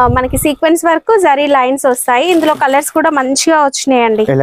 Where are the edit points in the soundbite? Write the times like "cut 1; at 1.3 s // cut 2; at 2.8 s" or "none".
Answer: none